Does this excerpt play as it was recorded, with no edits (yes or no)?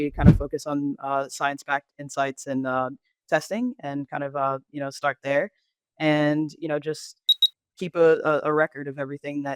yes